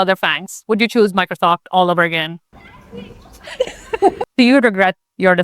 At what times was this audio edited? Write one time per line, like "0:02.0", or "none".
0:04.2